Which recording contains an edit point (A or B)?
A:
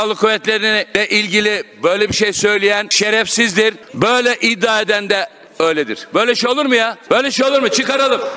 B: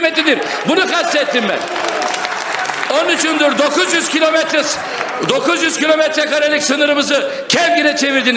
A